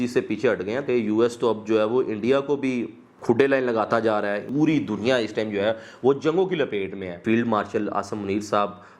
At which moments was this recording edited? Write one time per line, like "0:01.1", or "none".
0:00.8
0:04.5
0:07.2